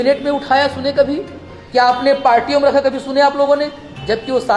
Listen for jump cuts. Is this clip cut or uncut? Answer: uncut